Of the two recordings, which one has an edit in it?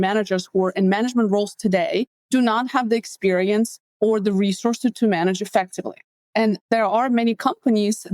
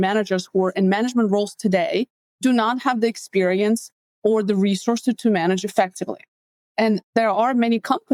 first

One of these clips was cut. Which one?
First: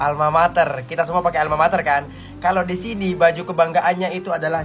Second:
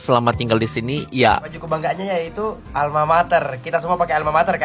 second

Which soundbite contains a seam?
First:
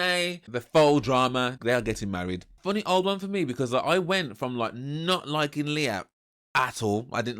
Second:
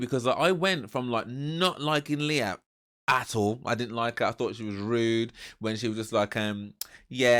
first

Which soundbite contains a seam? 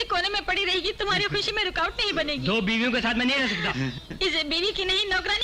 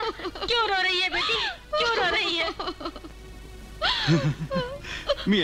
first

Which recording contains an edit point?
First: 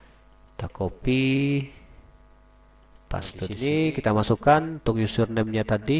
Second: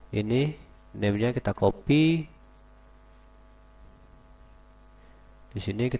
first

